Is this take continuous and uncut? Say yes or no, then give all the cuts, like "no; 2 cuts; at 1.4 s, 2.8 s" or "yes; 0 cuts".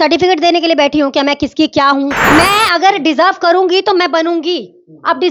no; 1 cut; at 2.2 s